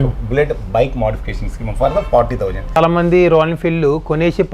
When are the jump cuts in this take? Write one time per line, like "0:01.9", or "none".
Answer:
0:02.8